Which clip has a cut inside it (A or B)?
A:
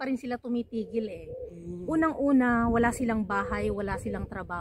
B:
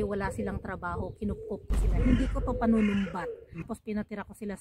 B